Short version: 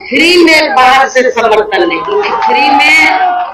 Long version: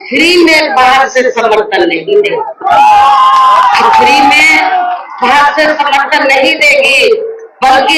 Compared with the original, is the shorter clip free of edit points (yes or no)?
no